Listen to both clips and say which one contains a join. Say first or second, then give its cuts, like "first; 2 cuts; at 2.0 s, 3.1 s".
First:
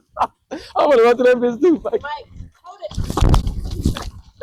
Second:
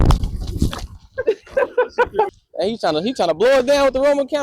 second; 1 cut; at 2.4 s